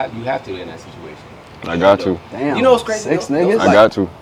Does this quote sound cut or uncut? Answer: uncut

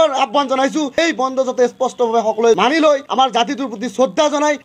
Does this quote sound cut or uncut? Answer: cut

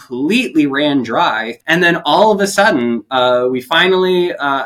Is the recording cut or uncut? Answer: cut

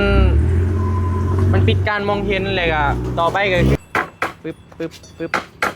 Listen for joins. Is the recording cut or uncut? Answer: cut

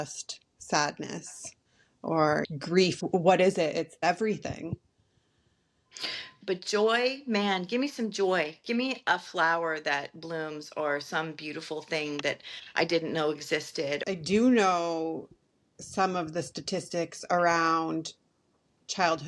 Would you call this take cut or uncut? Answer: cut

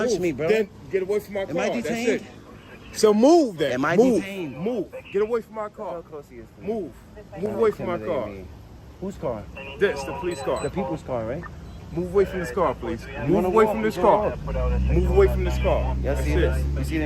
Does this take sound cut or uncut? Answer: uncut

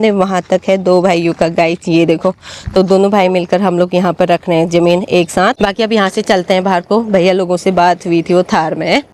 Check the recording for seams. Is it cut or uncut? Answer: uncut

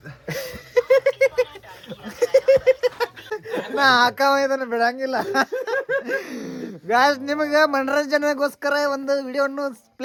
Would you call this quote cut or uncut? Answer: uncut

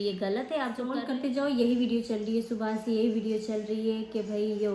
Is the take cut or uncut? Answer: cut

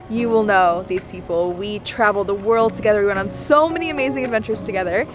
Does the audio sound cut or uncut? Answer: uncut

